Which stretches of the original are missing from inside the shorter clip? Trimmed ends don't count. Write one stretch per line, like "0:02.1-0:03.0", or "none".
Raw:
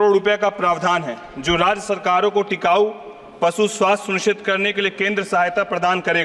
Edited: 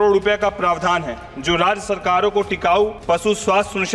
0:03.0-0:03.3